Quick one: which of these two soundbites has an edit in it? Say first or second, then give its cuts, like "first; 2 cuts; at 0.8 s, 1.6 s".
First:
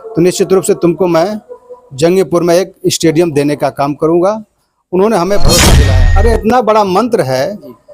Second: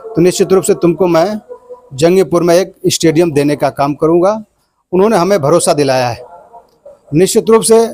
first; 1 cut; at 5.8 s